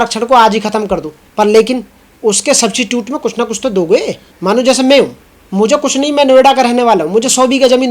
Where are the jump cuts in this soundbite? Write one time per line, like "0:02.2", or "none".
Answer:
0:01.2
0:04.2